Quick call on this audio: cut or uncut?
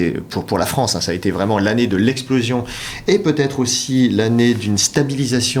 uncut